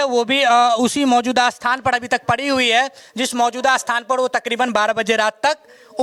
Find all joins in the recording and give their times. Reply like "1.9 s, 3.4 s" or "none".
none

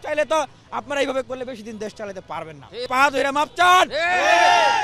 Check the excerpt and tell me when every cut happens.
2.9 s

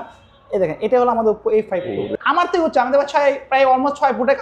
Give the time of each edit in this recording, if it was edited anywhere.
2.1 s

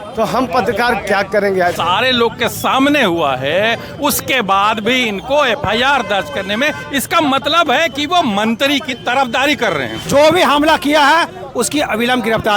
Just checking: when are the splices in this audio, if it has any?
1.8 s, 10.0 s

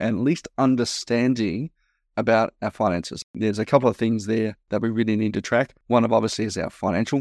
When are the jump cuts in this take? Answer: 3.3 s, 4.6 s, 5.8 s

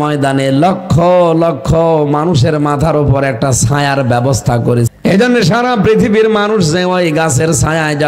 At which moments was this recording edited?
4.9 s

